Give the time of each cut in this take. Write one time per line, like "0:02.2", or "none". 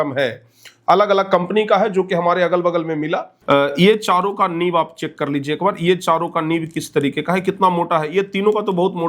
0:03.3